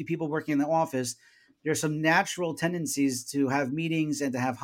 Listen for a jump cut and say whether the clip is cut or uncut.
uncut